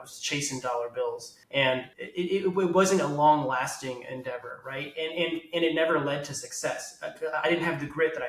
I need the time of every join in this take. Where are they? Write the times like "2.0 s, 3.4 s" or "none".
1.3 s, 2.0 s